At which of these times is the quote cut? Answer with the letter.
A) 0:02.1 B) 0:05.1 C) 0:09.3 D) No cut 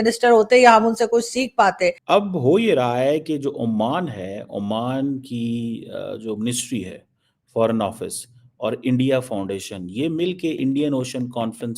A